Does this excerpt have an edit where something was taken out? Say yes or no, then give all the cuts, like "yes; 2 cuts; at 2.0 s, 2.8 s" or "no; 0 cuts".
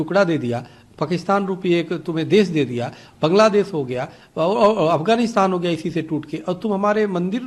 no; 0 cuts